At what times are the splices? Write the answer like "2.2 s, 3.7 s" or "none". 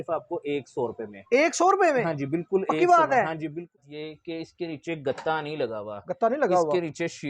3.9 s